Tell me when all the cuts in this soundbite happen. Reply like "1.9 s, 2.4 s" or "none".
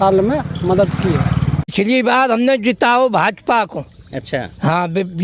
1.7 s